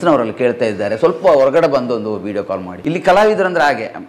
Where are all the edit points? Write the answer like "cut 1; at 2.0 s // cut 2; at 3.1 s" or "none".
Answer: cut 1; at 2.7 s